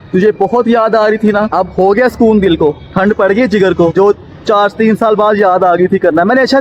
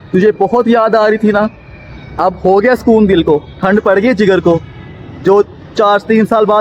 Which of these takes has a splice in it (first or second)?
first